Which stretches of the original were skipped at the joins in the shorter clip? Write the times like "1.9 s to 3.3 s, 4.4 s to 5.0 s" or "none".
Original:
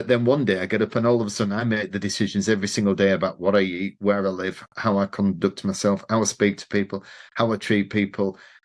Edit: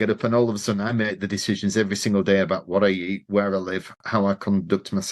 none